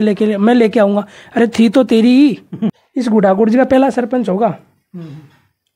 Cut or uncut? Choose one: cut